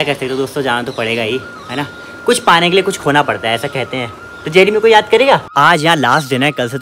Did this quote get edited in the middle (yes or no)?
yes